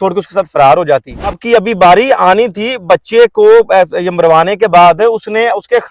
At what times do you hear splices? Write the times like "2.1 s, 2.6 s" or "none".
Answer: 1.4 s